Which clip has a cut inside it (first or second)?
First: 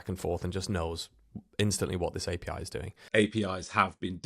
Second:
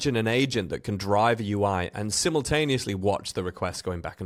first